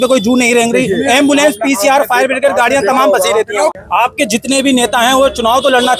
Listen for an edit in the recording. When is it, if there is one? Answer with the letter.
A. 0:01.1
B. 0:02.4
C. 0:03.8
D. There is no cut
C